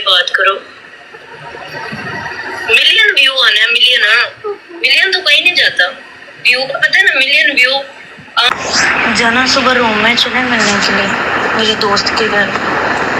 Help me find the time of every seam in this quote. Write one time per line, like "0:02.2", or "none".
0:08.5